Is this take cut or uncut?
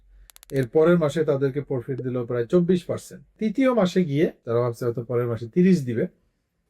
cut